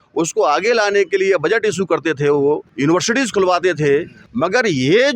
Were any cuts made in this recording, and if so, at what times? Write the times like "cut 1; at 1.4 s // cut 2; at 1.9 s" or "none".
cut 1; at 2.7 s // cut 2; at 4.2 s